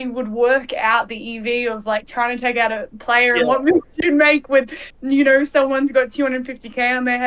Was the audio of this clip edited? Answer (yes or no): no